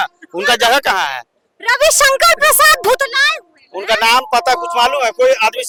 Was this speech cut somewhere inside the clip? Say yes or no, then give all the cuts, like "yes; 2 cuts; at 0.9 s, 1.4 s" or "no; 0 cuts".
no; 0 cuts